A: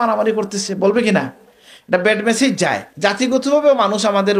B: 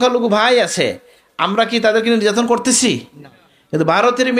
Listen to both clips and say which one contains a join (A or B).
A